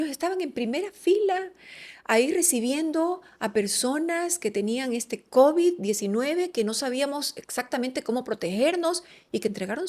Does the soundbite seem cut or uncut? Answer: uncut